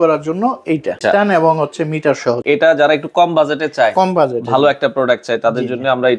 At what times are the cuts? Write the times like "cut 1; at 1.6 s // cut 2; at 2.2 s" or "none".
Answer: cut 1; at 1.0 s // cut 2; at 2.4 s

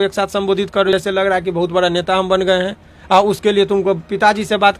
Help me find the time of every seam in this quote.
cut 1; at 0.9 s

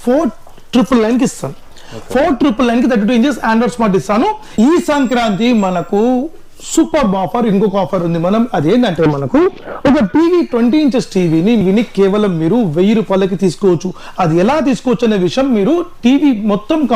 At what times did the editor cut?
cut 1; at 4.4 s // cut 2; at 11.6 s

